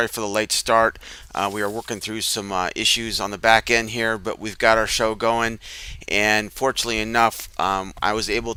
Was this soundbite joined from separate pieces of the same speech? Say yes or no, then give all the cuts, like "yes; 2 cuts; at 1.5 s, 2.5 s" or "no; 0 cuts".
no; 0 cuts